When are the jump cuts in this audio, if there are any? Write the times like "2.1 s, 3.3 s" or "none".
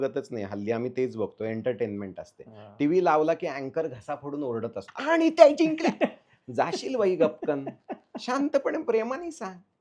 4.9 s